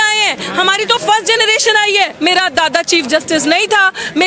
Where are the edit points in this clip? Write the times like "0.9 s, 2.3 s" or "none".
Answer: 2.1 s